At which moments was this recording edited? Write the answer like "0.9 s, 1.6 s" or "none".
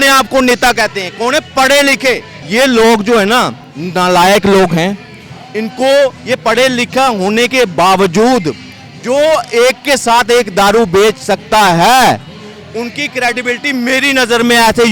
2.3 s